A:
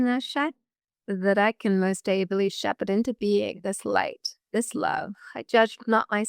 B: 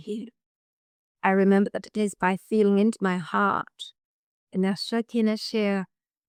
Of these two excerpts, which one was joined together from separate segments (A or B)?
A